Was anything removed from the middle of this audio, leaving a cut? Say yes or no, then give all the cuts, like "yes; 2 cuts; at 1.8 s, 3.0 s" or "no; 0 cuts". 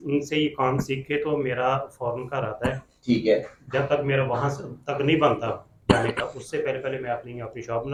no; 0 cuts